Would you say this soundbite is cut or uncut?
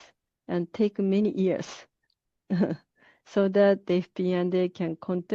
uncut